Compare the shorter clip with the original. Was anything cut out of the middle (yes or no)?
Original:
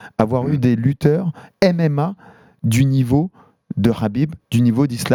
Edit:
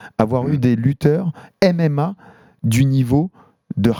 no